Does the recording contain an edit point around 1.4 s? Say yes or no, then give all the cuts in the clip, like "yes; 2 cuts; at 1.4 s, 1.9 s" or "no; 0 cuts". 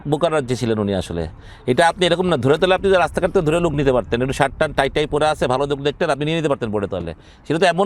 no; 0 cuts